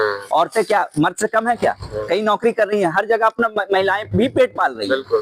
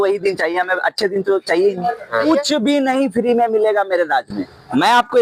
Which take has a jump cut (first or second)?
second